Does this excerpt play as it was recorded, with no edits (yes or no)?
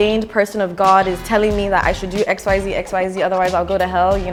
yes